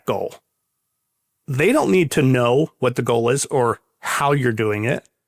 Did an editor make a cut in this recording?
no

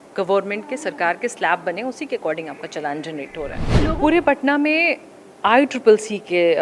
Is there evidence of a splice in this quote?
yes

